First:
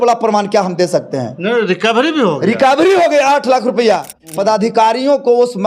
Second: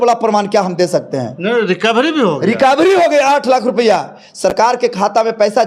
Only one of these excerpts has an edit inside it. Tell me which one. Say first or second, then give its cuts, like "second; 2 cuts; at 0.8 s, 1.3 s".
first; 1 cut; at 4.2 s